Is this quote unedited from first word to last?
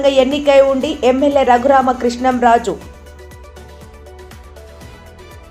yes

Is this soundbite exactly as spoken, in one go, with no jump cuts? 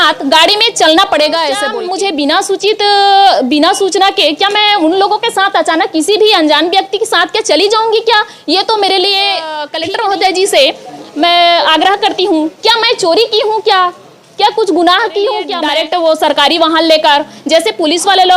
no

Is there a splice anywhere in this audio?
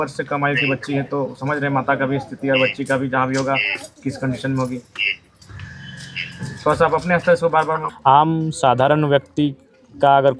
yes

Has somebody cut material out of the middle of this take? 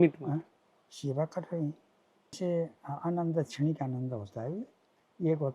yes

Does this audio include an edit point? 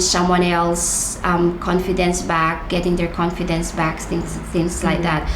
no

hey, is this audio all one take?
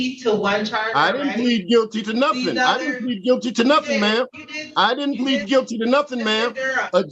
yes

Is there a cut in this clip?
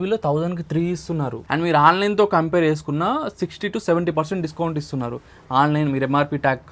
yes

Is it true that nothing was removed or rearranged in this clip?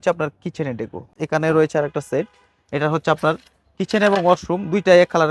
no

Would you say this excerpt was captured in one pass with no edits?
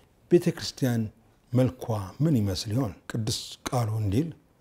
no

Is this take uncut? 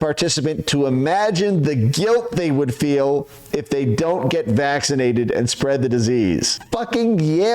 no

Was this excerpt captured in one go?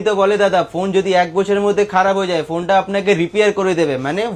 yes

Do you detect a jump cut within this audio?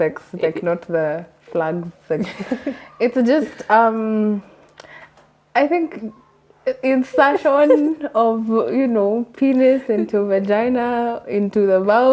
no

